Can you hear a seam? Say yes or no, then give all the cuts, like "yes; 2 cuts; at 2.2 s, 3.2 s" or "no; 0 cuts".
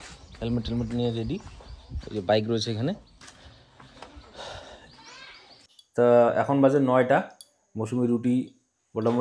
yes; 1 cut; at 5.8 s